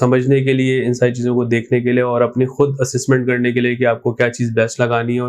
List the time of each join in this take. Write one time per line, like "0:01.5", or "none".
none